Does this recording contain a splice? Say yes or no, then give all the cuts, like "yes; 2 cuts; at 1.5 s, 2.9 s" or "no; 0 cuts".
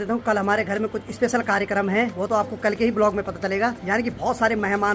no; 0 cuts